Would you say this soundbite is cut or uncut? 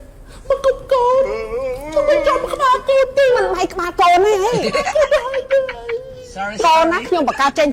uncut